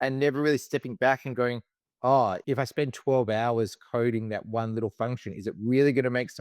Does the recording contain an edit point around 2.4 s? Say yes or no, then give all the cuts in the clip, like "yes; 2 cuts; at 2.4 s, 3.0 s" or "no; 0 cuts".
yes; 1 cut; at 2.4 s